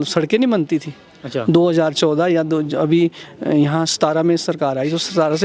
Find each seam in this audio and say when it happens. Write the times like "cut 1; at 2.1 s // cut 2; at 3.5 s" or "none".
none